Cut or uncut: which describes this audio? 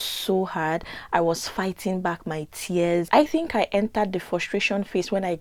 uncut